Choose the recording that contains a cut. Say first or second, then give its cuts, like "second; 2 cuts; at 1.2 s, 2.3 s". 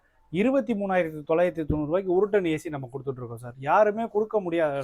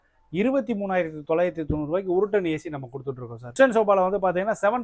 second; 1 cut; at 3.4 s